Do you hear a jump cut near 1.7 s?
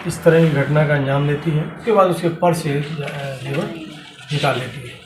yes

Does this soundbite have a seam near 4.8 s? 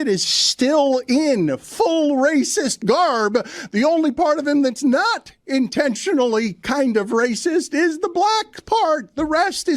no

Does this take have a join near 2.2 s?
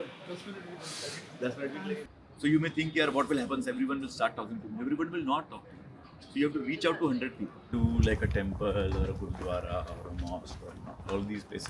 yes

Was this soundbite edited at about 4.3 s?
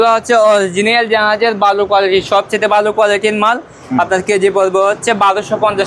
no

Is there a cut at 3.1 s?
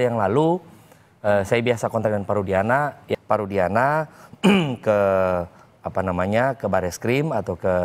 yes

